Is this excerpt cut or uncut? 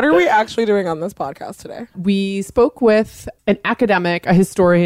cut